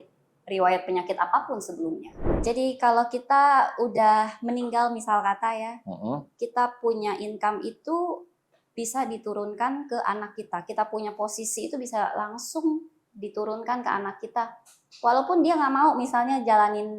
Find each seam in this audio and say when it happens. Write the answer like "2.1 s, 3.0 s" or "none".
2.3 s